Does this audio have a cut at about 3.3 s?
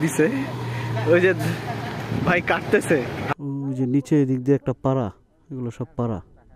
yes; 1 cut; at 3.3 s

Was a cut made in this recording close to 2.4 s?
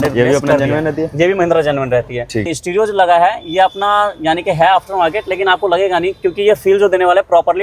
yes; 1 cut; at 2.4 s

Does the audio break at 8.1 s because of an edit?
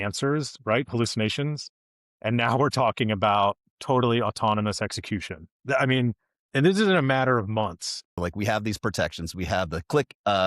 yes; 1 cut; at 8.1 s

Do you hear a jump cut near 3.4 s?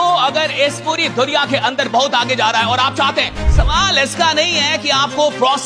yes; 1 cut; at 3.4 s

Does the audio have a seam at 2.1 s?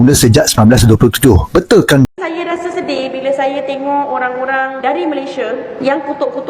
yes; 1 cut; at 2.1 s

